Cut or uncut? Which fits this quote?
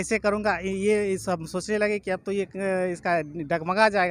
uncut